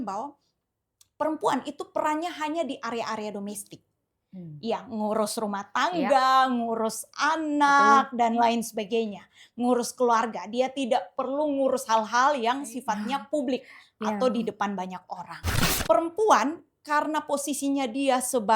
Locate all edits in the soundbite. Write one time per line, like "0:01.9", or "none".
0:15.7